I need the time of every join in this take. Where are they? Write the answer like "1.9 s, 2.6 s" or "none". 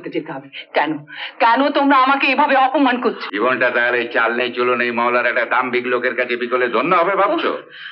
3.2 s

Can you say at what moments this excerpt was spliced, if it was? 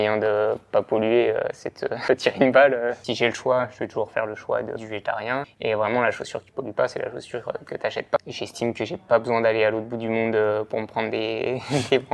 1.9 s, 3.0 s, 5.3 s, 8.2 s

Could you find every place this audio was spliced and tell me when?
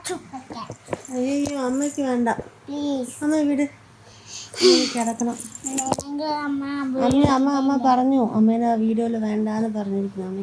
none

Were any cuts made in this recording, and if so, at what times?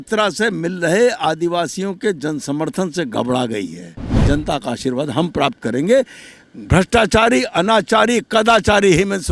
4.2 s

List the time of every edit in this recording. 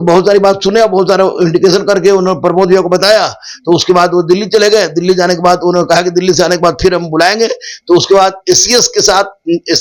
none

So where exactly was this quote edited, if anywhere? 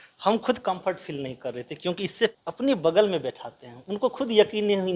2.4 s

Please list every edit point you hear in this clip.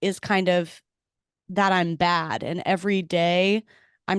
none

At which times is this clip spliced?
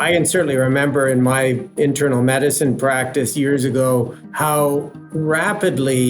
4.2 s, 5.0 s

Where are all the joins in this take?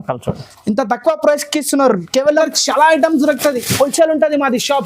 2.4 s

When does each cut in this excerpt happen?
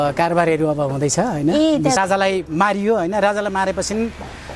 2.0 s

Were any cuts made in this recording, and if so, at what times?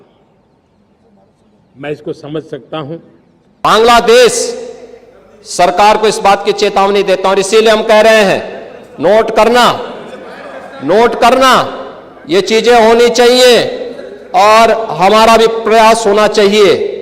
3.5 s

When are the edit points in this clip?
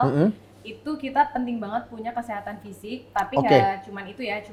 none

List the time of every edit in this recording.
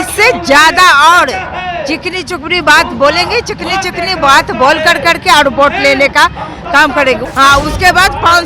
7.2 s

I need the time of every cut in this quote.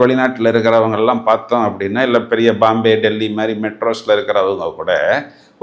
none

